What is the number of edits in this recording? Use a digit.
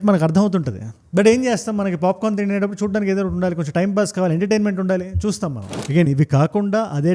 1